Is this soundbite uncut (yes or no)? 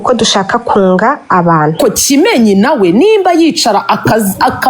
no